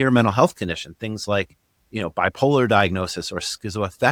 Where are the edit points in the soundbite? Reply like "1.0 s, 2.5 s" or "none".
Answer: none